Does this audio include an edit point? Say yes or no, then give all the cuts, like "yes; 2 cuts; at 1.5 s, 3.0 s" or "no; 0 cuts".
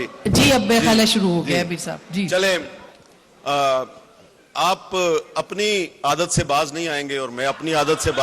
no; 0 cuts